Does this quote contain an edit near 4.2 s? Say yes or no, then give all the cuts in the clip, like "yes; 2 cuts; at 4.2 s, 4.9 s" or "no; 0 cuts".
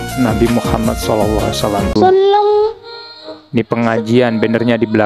no; 1 cut; at 2.0 s